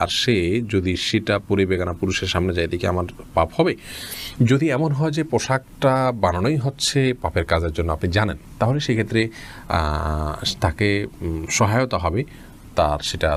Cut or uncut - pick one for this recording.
uncut